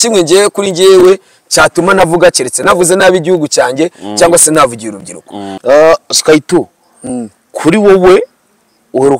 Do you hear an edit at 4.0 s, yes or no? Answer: no